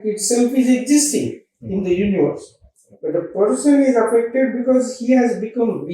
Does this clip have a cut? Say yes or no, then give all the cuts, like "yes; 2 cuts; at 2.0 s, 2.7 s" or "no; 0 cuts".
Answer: no; 0 cuts